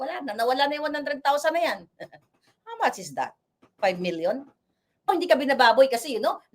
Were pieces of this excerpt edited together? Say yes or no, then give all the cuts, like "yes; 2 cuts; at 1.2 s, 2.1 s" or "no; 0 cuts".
yes; 1 cut; at 5.1 s